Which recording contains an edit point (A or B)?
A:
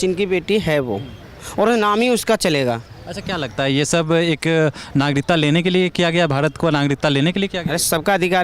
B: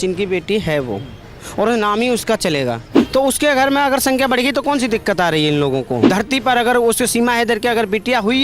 B